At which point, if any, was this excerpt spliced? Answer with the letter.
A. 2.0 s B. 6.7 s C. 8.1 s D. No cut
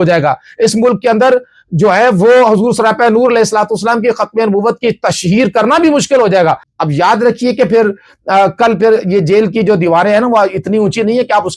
B